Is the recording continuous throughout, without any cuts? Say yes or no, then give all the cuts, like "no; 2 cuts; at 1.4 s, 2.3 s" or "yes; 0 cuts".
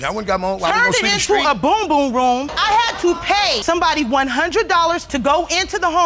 yes; 0 cuts